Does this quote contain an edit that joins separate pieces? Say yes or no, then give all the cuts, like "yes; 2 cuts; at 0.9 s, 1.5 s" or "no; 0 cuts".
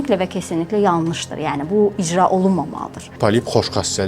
yes; 1 cut; at 3.1 s